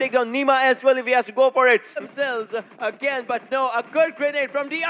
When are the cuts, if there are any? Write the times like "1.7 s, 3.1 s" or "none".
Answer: 2.0 s